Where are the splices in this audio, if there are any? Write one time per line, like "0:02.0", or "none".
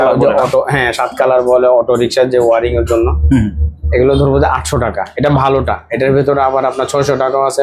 none